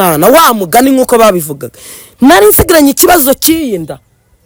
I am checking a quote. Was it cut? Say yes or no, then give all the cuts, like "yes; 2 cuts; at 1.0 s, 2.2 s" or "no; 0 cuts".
no; 0 cuts